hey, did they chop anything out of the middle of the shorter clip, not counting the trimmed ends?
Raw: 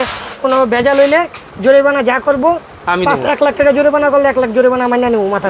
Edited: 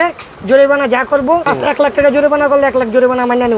yes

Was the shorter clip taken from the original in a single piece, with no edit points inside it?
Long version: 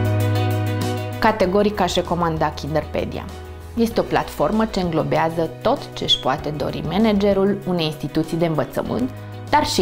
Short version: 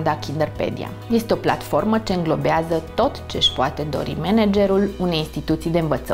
no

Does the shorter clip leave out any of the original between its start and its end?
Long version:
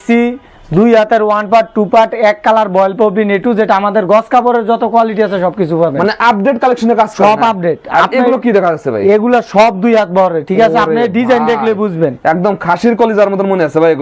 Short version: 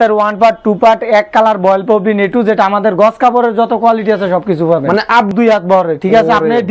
yes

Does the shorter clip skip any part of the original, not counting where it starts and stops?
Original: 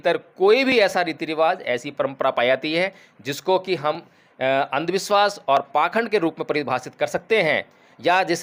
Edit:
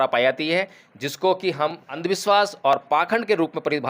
yes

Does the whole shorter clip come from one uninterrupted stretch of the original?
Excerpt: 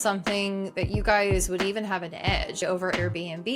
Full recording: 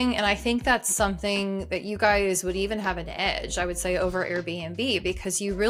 no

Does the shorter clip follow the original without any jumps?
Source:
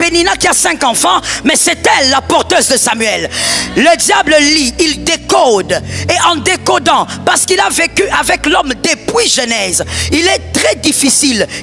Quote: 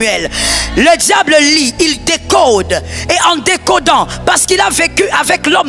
yes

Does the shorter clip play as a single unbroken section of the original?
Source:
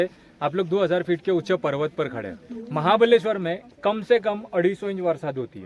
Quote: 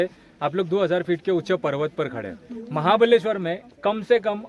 yes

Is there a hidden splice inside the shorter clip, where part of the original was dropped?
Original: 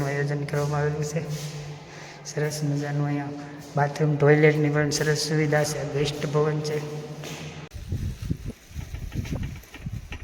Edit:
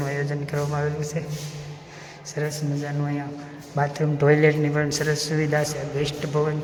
no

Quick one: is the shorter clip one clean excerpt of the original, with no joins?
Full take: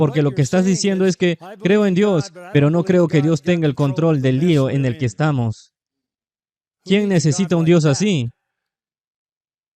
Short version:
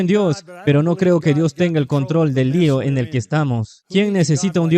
no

